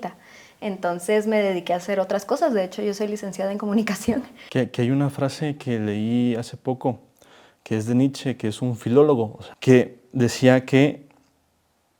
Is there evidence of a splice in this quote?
yes; 2 cuts; at 4.4 s, 9.4 s

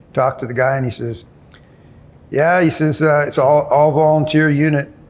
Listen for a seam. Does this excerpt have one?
no; 0 cuts

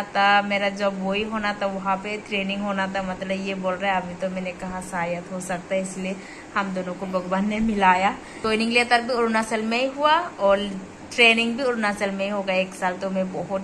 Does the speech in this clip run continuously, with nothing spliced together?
no; 1 cut; at 8.3 s

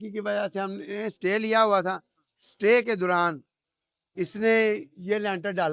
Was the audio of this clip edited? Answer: no; 0 cuts

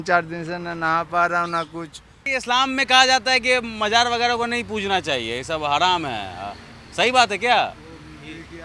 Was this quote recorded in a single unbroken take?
no; 1 cut; at 2.3 s

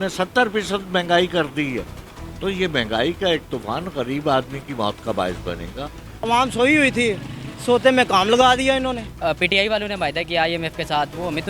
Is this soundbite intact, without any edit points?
no; 2 cuts; at 6.2 s, 9.1 s

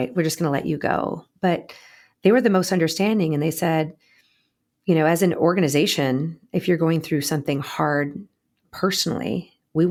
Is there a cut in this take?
no; 0 cuts

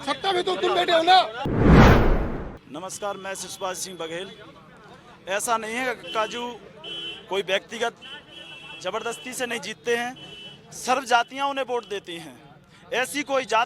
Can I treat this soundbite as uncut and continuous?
yes; 0 cuts

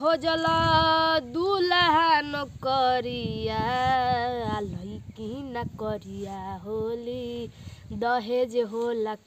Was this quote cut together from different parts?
no; 0 cuts

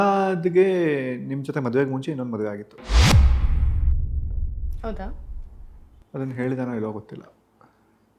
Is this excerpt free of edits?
yes; 0 cuts

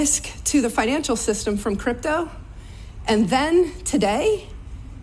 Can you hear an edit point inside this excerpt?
yes; 2 cuts; at 2.0 s, 4.1 s

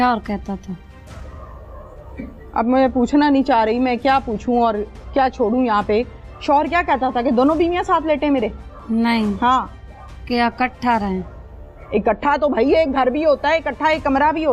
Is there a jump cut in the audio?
no; 0 cuts

